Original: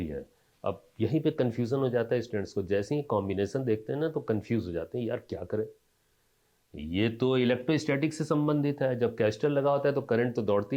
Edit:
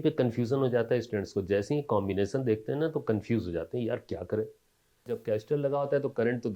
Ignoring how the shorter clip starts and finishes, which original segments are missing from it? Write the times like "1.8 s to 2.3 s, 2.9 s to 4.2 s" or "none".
6.3 s to 9.0 s